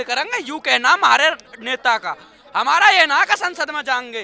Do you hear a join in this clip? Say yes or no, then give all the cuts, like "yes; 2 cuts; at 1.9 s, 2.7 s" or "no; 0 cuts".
no; 0 cuts